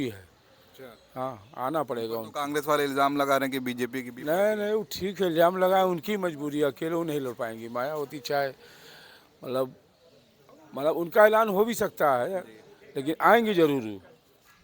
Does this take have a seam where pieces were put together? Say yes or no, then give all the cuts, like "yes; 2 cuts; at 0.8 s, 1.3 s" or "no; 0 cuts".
no; 0 cuts